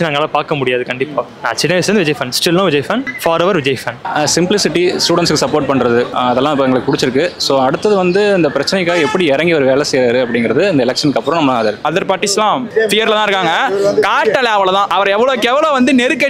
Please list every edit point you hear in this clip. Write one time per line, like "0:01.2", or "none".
0:04.0
0:11.8
0:12.7
0:14.9